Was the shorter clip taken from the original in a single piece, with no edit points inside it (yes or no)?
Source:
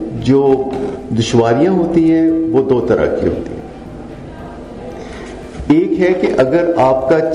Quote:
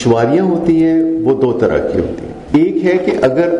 no